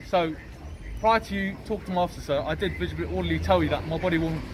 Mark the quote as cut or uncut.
uncut